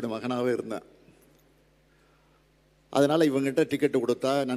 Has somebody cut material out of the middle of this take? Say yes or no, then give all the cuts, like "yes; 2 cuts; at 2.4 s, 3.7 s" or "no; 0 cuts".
no; 0 cuts